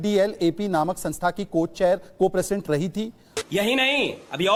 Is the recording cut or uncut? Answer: uncut